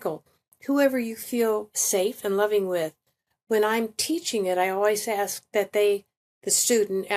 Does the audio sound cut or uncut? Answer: uncut